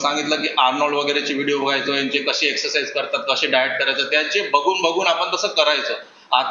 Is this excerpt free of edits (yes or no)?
yes